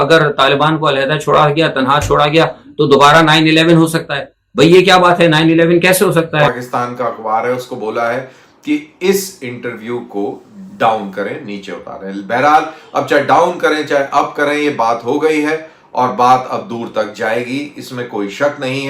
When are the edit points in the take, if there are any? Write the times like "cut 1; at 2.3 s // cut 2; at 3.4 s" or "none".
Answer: cut 1; at 6.6 s